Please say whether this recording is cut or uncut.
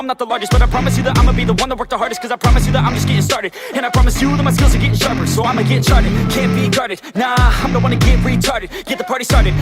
cut